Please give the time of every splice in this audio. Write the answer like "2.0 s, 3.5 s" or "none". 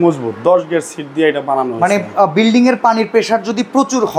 none